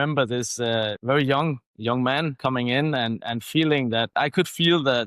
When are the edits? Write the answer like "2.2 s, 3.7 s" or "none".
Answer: 0.9 s, 2.3 s, 4.1 s